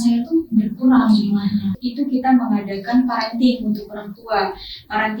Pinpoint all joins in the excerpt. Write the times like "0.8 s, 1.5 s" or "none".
1.8 s